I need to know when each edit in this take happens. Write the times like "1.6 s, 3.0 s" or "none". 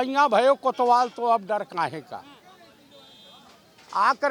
none